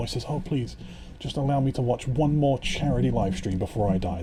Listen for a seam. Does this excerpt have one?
no; 0 cuts

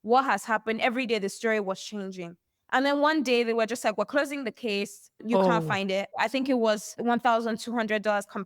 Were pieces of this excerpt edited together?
yes; 3 cuts; at 5.2 s, 6.1 s, 6.9 s

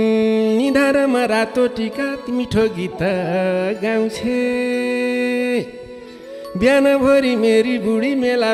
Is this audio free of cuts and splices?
yes; 0 cuts

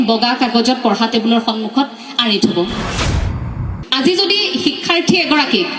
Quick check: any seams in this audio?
yes; 1 cut; at 3.4 s

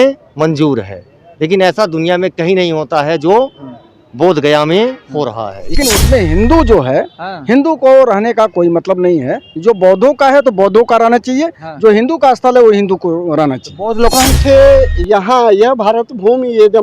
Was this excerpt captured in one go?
no; 2 cuts; at 5.8 s, 14.1 s

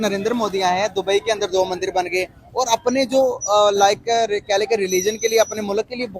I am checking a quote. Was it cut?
no; 0 cuts

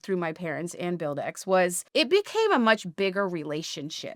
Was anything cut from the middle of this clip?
yes; 1 cut; at 1.8 s

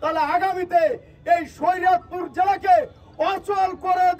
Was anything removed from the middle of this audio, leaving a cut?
no; 0 cuts

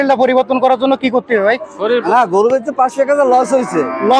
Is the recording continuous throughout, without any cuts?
no; 1 cut; at 2.0 s

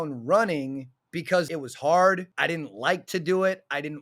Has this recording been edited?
yes; 2 cuts; at 1.5 s, 2.3 s

